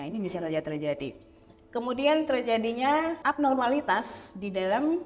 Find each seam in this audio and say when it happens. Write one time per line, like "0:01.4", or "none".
0:03.2